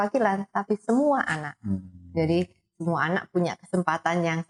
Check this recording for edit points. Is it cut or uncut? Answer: uncut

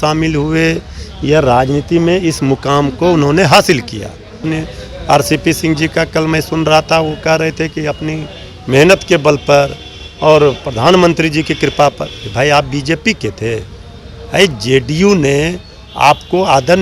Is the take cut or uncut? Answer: cut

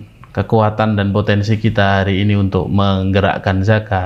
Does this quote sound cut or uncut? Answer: uncut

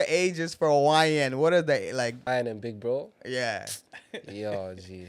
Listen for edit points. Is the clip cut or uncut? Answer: cut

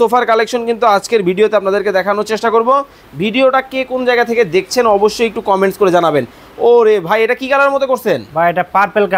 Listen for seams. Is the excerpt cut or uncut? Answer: uncut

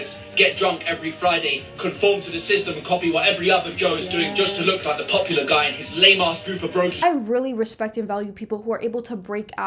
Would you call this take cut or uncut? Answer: cut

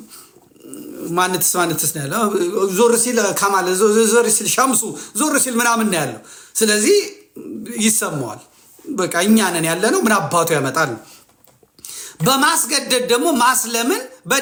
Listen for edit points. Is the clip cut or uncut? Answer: uncut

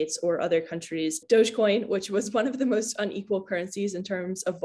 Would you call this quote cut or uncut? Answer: cut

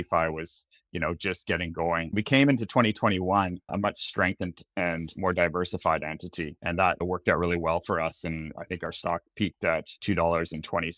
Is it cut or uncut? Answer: cut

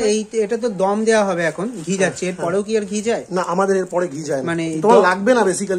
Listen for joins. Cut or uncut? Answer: uncut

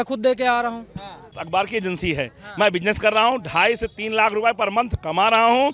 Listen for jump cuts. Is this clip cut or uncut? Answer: cut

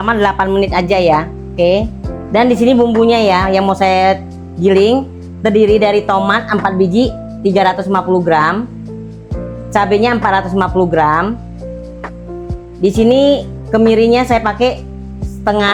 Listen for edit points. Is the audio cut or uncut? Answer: uncut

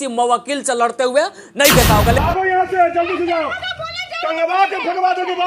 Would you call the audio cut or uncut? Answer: cut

